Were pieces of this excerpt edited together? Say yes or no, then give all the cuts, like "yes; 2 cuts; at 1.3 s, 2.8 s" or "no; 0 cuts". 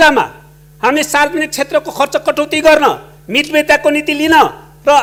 no; 0 cuts